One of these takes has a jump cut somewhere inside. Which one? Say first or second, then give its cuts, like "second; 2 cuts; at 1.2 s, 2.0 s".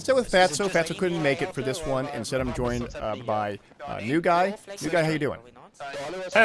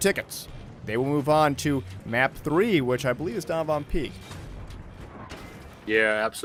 first; 1 cut; at 4.5 s